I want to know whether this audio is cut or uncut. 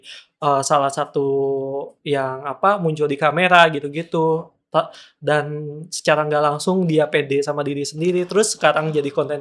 uncut